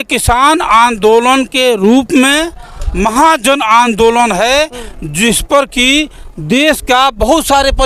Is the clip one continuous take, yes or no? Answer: yes